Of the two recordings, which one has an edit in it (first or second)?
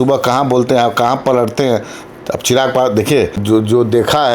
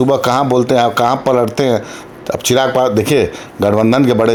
first